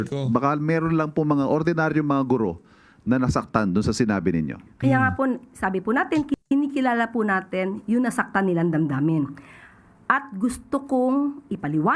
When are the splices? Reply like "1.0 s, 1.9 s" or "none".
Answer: 6.4 s